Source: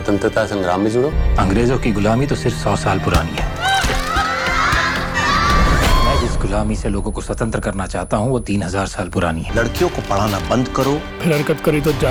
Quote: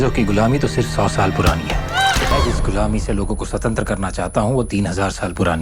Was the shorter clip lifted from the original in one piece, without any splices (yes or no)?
no